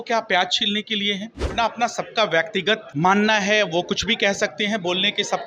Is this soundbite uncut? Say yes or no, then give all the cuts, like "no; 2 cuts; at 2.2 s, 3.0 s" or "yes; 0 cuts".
no; 2 cuts; at 1.5 s, 2.9 s